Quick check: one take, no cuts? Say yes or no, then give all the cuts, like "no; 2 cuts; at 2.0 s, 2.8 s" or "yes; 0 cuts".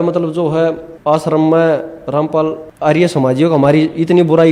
no; 2 cuts; at 0.9 s, 2.7 s